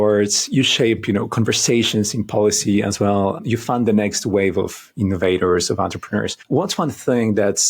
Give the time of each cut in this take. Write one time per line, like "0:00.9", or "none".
0:03.4
0:06.4